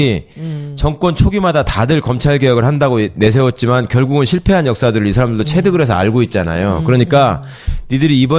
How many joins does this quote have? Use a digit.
1